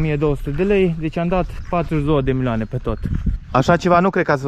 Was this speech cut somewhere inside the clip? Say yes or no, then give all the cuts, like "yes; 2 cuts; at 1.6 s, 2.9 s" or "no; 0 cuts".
yes; 1 cut; at 3.3 s